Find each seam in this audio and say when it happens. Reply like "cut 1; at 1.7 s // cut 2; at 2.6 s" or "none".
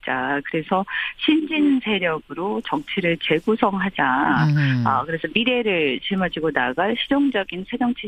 none